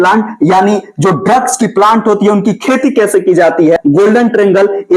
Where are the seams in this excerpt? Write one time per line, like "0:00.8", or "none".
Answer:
0:03.8